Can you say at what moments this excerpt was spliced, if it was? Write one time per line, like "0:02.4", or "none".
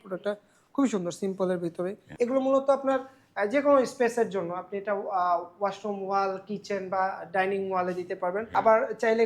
0:02.0
0:08.5

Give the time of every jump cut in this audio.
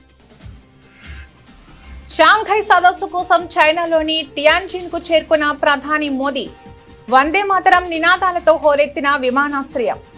0:01.7

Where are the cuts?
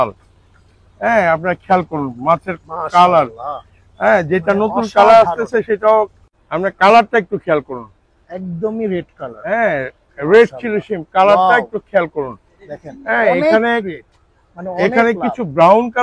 0:06.2

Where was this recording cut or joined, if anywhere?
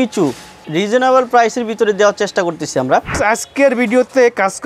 0:03.1

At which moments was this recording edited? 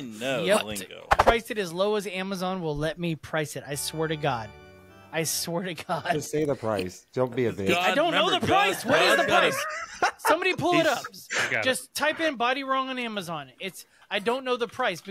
0:01.2

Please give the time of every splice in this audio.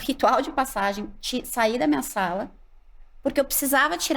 none

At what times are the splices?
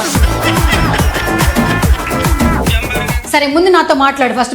0:03.2

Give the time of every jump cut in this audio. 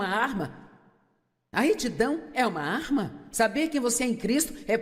0:02.3

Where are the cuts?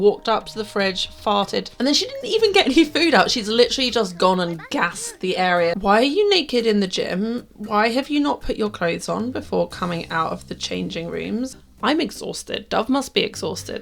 0:01.7
0:05.8
0:11.6

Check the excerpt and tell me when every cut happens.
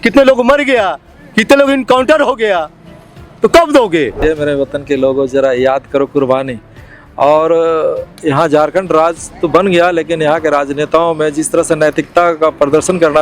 0:04.2

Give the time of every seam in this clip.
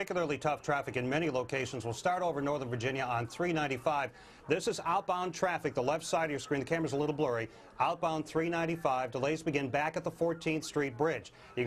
none

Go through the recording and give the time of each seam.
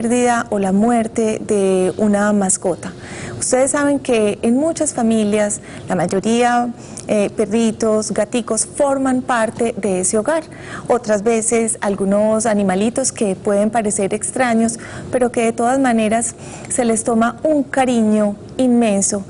0:10.1

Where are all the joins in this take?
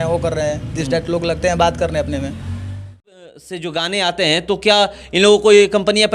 0:03.5

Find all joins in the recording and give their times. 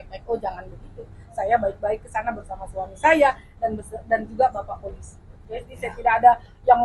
0:05.3

